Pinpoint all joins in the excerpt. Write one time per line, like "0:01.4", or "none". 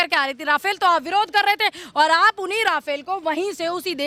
none